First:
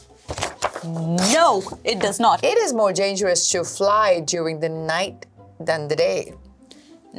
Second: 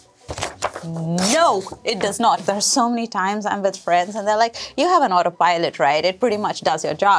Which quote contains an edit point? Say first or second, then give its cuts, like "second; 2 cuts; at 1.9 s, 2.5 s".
first; 1 cut; at 2.4 s